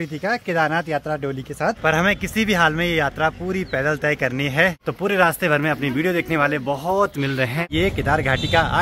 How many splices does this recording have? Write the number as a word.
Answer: three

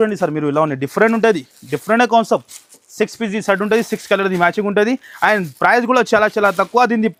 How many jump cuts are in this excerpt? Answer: zero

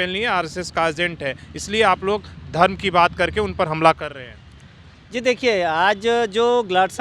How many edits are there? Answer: zero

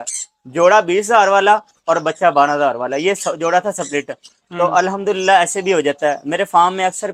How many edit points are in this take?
zero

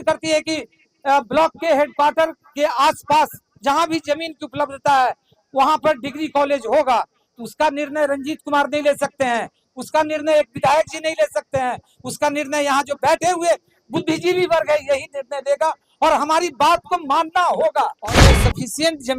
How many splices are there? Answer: one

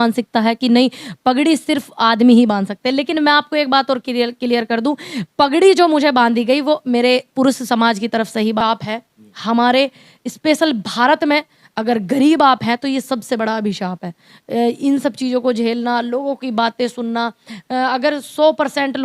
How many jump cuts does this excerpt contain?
one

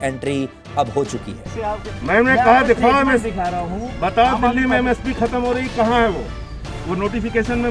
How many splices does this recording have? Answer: one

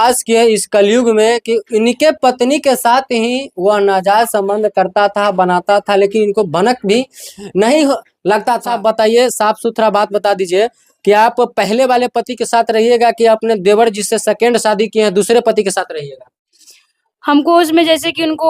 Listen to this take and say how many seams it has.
one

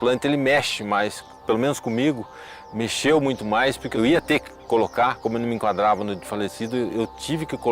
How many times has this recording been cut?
two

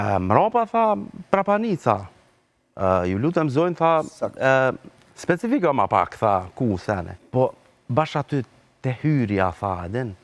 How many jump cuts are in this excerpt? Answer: one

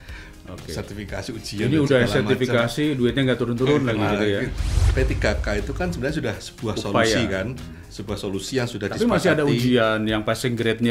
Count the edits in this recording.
one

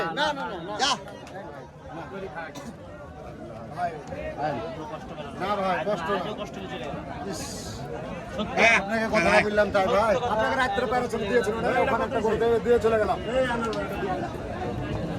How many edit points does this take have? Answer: zero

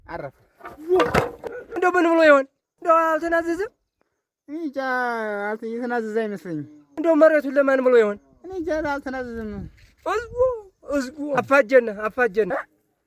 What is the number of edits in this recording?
one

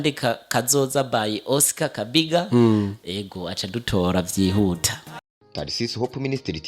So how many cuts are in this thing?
one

